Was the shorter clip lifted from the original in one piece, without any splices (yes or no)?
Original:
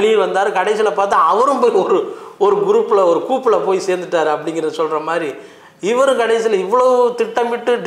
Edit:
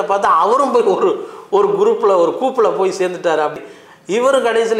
no